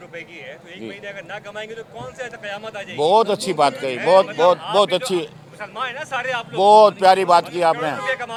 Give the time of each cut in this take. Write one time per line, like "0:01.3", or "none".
none